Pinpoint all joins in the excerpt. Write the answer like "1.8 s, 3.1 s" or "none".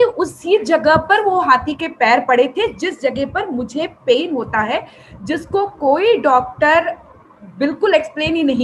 none